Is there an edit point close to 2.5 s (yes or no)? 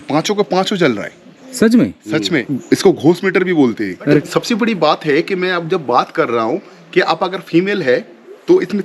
yes